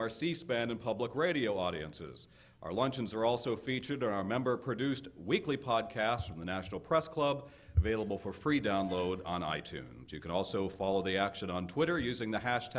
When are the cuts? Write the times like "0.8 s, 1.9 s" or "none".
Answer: 3.7 s